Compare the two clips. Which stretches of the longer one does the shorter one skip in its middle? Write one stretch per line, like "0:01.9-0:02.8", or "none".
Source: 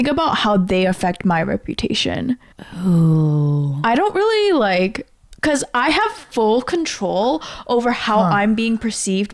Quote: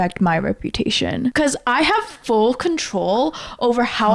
0:02.4-0:05.4